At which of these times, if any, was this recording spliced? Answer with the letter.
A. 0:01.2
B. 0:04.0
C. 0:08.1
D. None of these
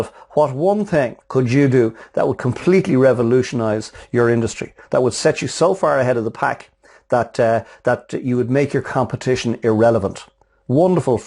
A